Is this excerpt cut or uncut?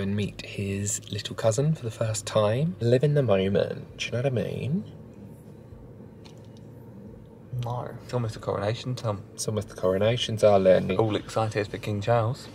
cut